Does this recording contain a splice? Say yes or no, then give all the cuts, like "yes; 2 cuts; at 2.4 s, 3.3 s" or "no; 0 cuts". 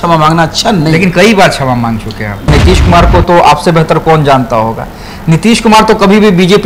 yes; 1 cut; at 2.5 s